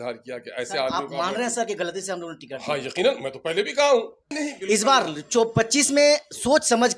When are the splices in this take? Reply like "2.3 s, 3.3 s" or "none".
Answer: 4.3 s